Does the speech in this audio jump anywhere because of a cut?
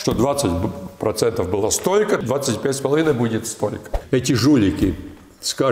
yes; 2 cuts; at 2.2 s, 3.9 s

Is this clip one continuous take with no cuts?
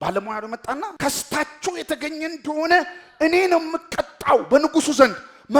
no; 1 cut; at 0.9 s

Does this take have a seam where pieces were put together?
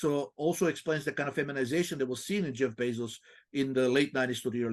no; 0 cuts

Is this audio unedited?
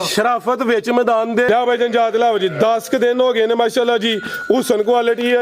no; 1 cut; at 1.5 s

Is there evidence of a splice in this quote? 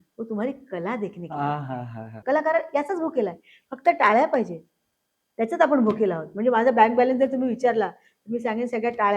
yes; 1 cut; at 2.2 s

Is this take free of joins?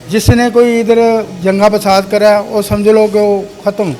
yes; 0 cuts

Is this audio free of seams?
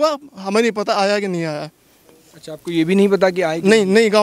yes; 0 cuts

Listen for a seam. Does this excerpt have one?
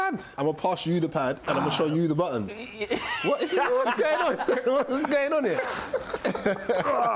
no; 0 cuts

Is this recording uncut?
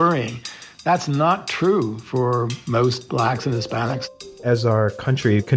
no; 2 cuts; at 2.8 s, 4.3 s

